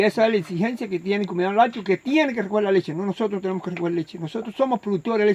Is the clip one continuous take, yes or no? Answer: yes